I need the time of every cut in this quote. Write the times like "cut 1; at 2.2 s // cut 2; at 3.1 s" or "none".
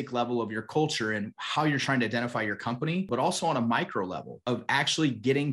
cut 1; at 3.1 s // cut 2; at 4.4 s